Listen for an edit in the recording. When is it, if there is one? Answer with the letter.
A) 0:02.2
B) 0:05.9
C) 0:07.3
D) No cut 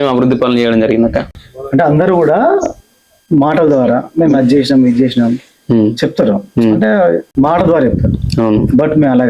C